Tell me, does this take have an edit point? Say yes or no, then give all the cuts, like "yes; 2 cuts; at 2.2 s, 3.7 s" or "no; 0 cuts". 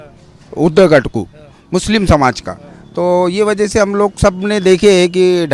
no; 0 cuts